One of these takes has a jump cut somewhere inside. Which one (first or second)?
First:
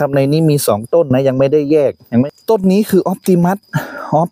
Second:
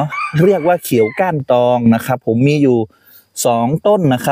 first